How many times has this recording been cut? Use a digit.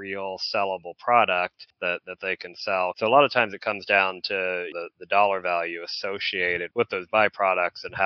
3